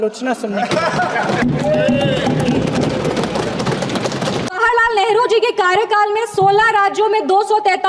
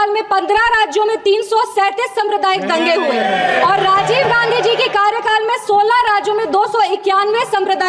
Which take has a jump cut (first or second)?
first